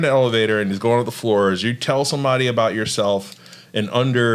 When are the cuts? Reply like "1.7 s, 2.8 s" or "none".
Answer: none